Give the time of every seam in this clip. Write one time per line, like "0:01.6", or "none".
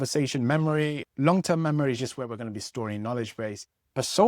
0:01.0